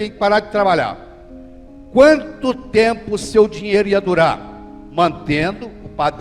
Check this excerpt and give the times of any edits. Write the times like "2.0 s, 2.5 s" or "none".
none

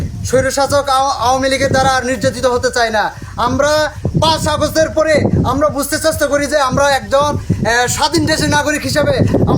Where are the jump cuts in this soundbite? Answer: none

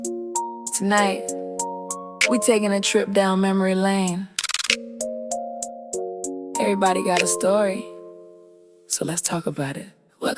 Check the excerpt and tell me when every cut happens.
none

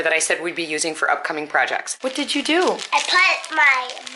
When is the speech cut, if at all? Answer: 2.2 s

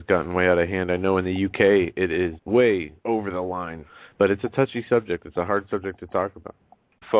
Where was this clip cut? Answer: 2.2 s

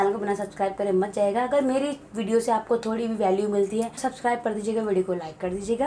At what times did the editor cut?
4.1 s

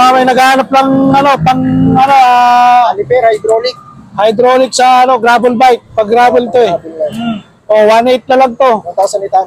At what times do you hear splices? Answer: none

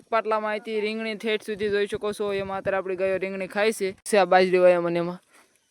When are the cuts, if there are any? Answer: 4.1 s

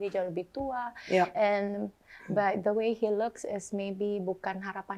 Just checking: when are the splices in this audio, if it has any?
none

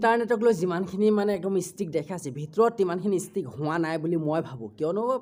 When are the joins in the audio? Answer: none

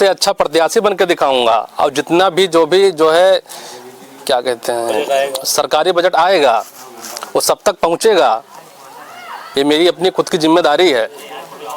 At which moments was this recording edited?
none

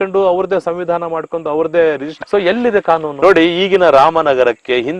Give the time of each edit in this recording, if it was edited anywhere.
2.1 s, 3.1 s

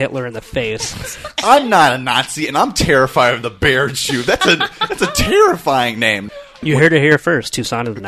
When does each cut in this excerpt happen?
1.3 s, 6.6 s

